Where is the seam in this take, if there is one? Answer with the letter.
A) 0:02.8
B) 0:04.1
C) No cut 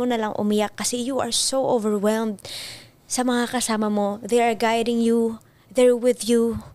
C